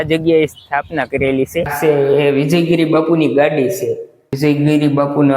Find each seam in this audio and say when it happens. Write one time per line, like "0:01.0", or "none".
0:01.7
0:04.2

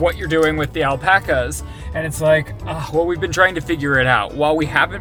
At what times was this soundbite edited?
none

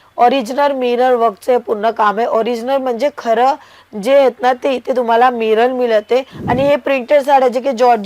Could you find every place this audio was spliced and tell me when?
0:06.4

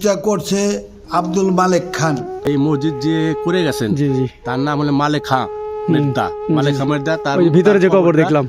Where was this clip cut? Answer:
0:02.4

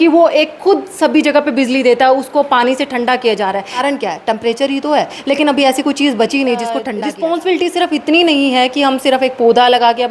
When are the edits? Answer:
0:03.8
0:05.2
0:06.9

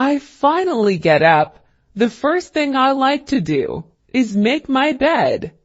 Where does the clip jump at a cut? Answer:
0:01.3

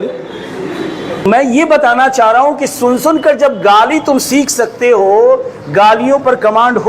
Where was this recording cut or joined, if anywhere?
0:01.2

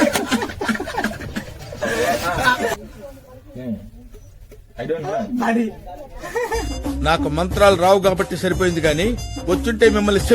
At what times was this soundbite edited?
0:02.7

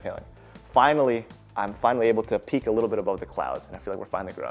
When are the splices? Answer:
none

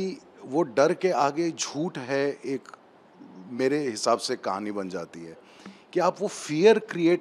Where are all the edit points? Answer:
none

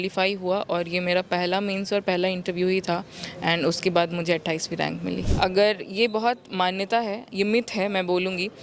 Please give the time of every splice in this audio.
0:05.3

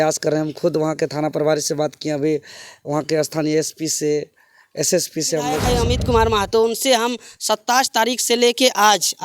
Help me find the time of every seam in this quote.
0:05.6

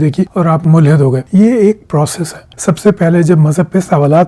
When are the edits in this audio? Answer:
0:02.5

